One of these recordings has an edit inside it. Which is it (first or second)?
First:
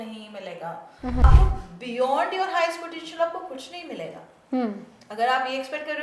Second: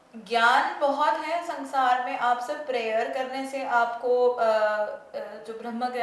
first